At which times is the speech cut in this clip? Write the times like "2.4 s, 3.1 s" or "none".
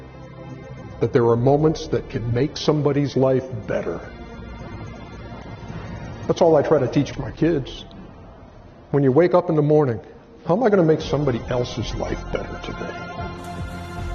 7.1 s